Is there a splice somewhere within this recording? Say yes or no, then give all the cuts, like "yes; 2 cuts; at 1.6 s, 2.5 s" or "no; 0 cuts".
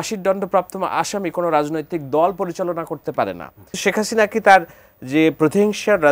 yes; 1 cut; at 3.8 s